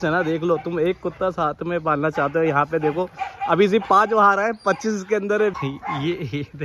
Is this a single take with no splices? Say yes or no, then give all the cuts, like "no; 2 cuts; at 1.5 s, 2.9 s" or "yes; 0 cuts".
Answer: no; 1 cut; at 5.5 s